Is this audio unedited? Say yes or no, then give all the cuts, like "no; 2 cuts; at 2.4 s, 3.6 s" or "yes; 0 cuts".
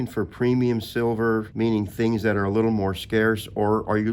no; 1 cut; at 1.5 s